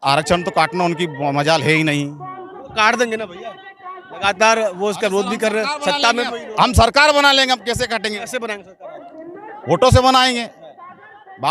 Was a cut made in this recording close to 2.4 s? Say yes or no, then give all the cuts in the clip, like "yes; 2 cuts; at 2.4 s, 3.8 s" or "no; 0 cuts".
no; 0 cuts